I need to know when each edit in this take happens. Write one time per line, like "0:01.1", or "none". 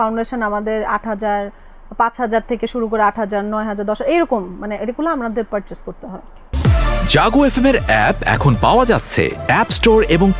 0:06.5